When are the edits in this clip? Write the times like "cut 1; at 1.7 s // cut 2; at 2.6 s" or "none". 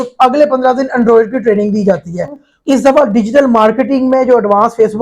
cut 1; at 2.5 s